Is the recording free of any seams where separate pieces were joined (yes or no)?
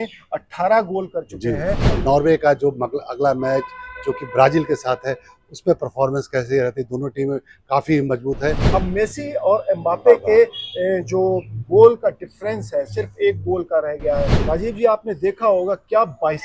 no